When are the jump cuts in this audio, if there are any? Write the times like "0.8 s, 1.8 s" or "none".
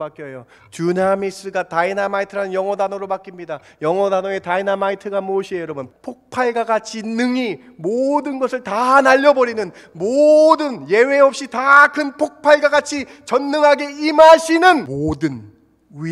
5.8 s, 14.9 s

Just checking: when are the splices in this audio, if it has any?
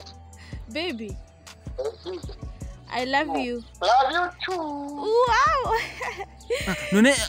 3.7 s

